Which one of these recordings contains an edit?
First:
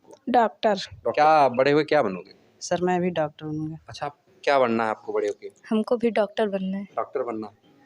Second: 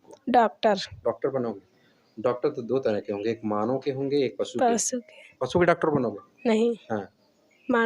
first; 2 cuts; at 1.1 s, 4.1 s

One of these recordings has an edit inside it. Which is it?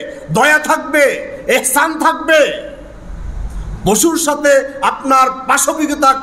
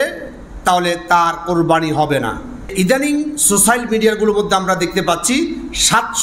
second; 1 cut; at 2.6 s

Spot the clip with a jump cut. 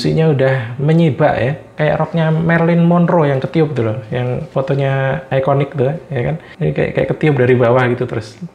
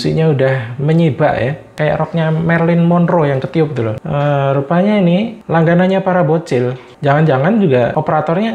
second; 2 cuts; at 4.0 s, 5.4 s

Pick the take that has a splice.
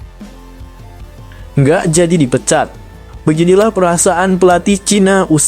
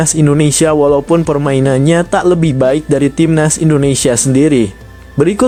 first; 1 cut; at 1.5 s

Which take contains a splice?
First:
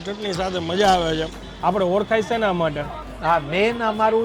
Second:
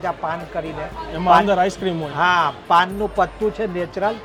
first; 2 cuts; at 1.4 s, 3.1 s

